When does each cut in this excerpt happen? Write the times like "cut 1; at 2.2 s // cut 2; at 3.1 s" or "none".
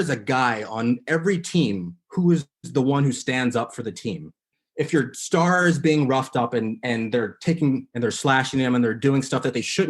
cut 1; at 4.6 s